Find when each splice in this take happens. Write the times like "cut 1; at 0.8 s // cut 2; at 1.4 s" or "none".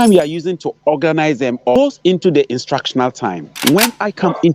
cut 1; at 1.8 s // cut 2; at 3.5 s

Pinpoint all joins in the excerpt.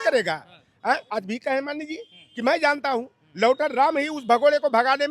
cut 1; at 1.1 s

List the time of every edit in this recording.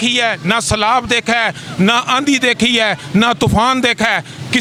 none

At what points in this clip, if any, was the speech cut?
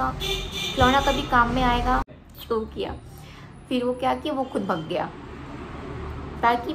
cut 1; at 2.0 s

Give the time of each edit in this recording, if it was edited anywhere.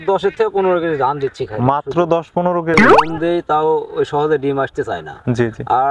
cut 1; at 2.8 s

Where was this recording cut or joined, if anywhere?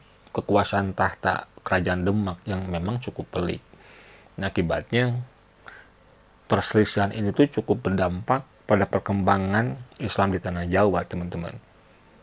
none

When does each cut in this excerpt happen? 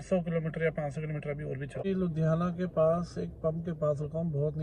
cut 1; at 1.8 s

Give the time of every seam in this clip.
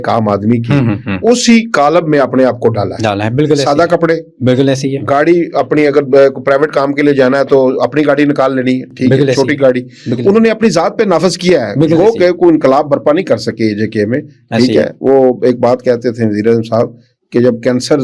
none

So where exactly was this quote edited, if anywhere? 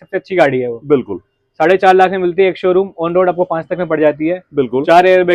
none

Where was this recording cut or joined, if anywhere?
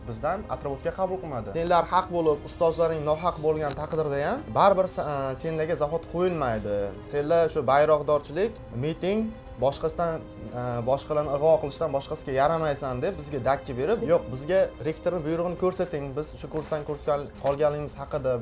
cut 1; at 1.4 s // cut 2; at 14.0 s

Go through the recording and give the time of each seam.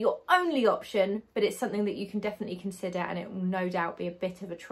none

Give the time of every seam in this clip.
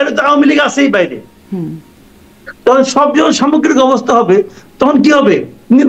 none

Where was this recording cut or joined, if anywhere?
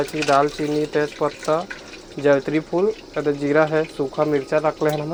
none

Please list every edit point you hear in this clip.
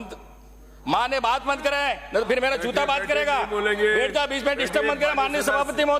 none

